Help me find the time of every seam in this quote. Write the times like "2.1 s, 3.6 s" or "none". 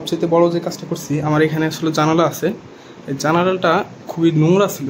none